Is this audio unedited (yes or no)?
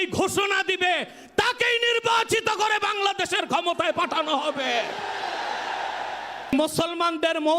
no